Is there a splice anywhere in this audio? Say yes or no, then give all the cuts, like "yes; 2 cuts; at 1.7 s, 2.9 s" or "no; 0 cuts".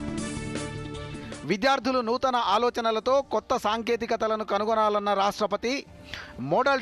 yes; 1 cut; at 1.3 s